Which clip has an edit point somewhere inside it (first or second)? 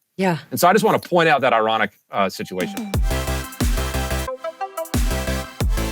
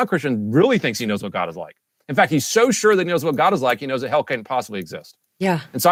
first